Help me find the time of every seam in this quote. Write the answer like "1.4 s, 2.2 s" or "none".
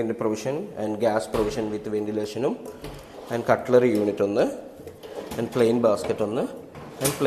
none